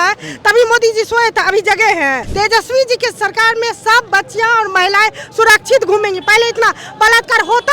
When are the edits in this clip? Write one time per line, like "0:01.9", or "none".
0:02.2